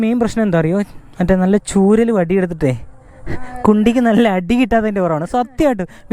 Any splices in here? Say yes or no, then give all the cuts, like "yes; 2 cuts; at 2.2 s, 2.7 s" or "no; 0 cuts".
no; 0 cuts